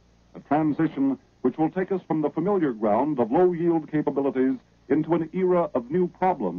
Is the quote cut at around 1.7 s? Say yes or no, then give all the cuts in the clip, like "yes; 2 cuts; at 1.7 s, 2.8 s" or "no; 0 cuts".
yes; 1 cut; at 1.7 s